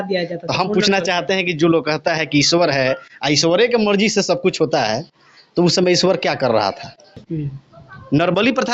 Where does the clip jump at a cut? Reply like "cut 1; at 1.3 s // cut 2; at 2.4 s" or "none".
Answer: cut 1; at 7.3 s